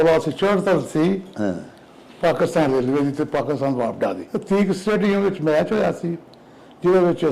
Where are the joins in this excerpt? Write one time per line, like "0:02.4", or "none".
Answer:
0:04.2